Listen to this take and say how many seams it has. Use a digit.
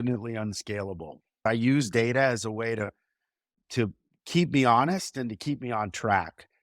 1